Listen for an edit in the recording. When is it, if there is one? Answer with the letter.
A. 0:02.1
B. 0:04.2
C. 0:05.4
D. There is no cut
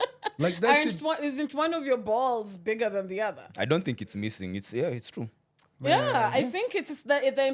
D